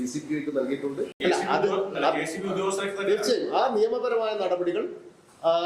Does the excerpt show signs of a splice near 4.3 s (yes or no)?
no